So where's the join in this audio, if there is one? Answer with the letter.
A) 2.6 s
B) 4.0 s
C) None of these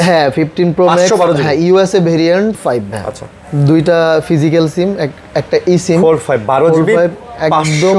A